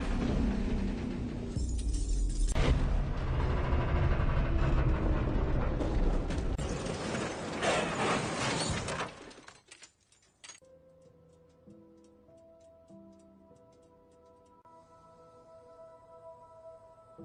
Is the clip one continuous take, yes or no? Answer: yes